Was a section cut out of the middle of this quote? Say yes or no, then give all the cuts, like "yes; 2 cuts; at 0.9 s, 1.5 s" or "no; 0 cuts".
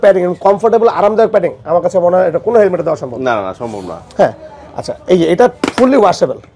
no; 0 cuts